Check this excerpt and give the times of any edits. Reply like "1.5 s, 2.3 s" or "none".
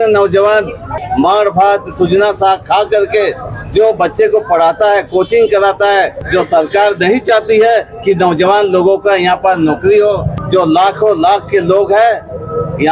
1.0 s, 6.2 s, 10.3 s